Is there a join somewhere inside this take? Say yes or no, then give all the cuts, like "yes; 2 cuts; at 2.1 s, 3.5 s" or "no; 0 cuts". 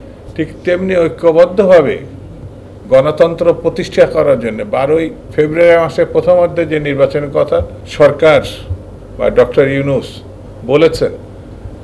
yes; 2 cuts; at 5.2 s, 7.8 s